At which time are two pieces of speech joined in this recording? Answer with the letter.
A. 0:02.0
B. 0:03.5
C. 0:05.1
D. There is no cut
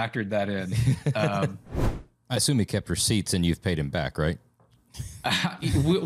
A